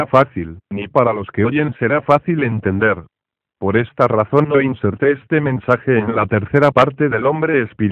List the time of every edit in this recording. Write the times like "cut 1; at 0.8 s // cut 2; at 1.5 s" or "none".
cut 1; at 3.9 s